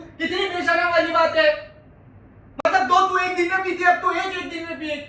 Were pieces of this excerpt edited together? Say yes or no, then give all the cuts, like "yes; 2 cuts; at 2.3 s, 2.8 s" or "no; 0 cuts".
no; 0 cuts